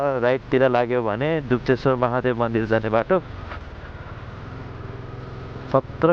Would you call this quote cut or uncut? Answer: uncut